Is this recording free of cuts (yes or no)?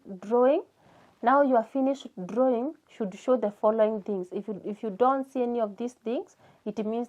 yes